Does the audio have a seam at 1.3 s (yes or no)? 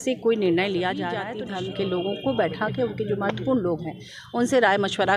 yes